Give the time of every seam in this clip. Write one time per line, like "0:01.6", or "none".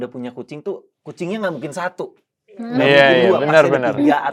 none